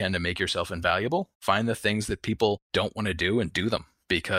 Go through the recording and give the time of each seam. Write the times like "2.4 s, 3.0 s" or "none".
1.3 s